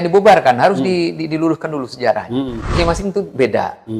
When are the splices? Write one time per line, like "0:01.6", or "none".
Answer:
0:02.7